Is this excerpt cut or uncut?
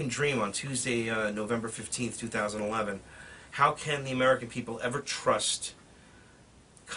uncut